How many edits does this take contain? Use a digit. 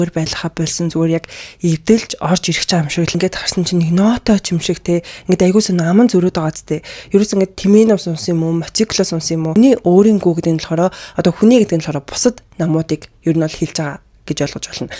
2